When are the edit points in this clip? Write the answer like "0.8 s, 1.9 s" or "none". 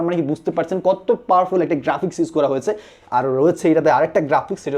none